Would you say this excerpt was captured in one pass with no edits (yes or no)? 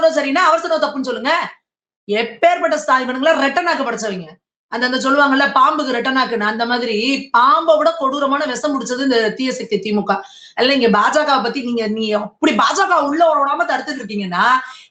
yes